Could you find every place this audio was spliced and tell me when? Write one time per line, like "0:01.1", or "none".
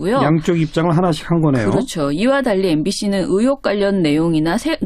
0:01.1